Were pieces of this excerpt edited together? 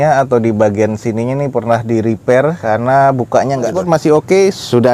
yes; 1 cut; at 3.8 s

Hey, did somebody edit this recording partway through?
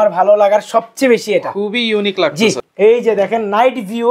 yes; 1 cut; at 2.6 s

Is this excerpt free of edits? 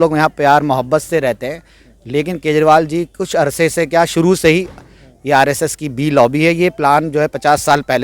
yes; 0 cuts

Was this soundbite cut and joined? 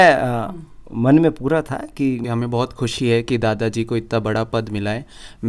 yes; 1 cut; at 2.2 s

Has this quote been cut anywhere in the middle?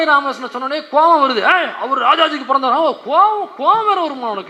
no; 0 cuts

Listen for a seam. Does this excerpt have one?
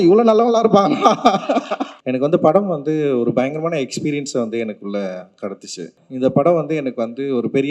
yes; 2 cuts; at 1.9 s, 6.0 s

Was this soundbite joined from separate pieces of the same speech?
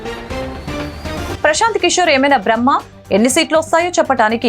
yes; 1 cut; at 1.2 s

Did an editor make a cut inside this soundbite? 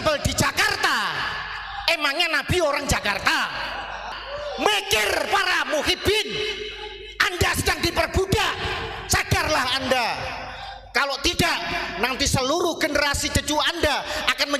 yes; 1 cut; at 4.1 s

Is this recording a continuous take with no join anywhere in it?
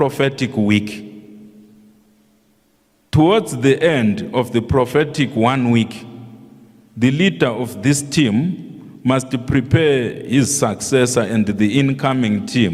yes; 0 cuts

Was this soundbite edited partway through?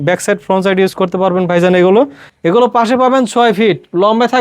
yes; 1 cut; at 2.3 s

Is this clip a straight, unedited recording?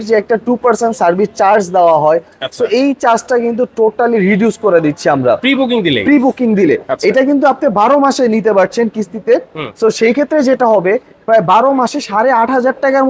yes; 0 cuts

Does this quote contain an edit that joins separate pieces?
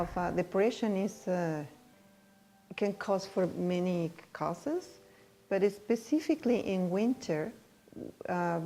no; 0 cuts

